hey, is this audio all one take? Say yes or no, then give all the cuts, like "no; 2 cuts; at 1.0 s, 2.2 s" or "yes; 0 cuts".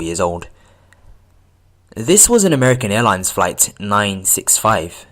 no; 1 cut; at 2.8 s